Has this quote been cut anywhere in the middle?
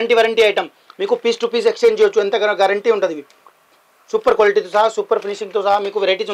no; 0 cuts

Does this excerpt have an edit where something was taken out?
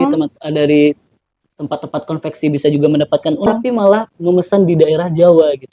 yes; 1 cut; at 3.5 s

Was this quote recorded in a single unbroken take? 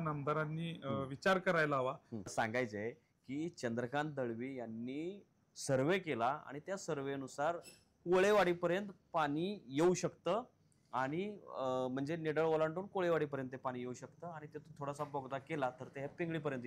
no; 1 cut; at 2.3 s

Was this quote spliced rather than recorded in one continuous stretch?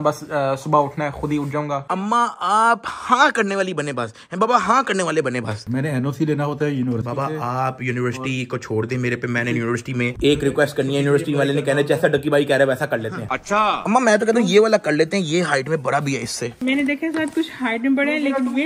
yes; 4 cuts; at 1.8 s, 5.6 s, 13.5 s, 16.6 s

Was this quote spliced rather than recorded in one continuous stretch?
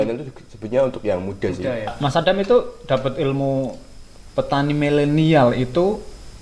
yes; 1 cut; at 1.9 s

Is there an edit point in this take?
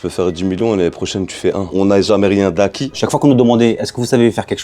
yes; 2 cuts; at 1.7 s, 3.0 s

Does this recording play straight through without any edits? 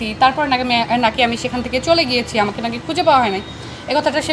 yes; 0 cuts

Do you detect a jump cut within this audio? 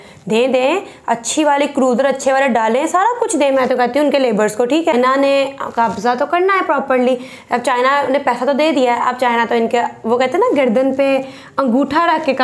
yes; 1 cut; at 5.3 s

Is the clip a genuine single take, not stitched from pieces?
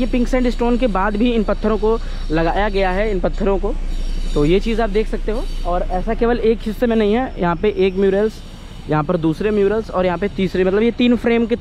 yes; 0 cuts

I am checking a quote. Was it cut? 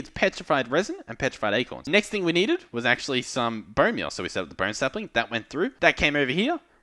yes; 2 cuts; at 1.8 s, 5.7 s

